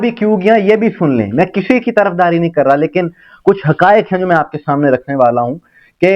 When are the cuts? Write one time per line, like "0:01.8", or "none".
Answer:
none